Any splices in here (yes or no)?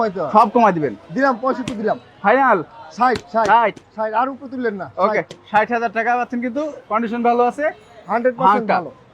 no